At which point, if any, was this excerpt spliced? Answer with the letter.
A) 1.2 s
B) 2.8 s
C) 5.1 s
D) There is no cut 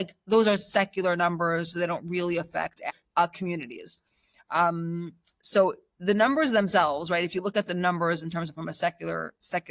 B